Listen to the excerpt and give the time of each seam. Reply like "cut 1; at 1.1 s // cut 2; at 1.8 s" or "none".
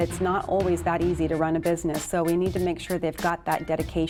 none